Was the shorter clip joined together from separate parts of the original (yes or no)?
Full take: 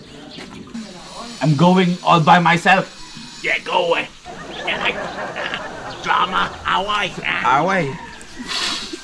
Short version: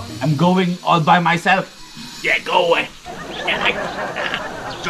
no